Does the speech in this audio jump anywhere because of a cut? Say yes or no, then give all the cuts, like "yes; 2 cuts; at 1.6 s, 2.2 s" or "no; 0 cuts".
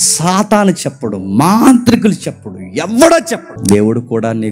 yes; 1 cut; at 3.5 s